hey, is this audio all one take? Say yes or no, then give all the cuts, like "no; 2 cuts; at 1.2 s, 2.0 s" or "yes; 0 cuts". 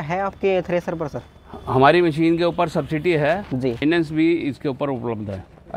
no; 1 cut; at 3.8 s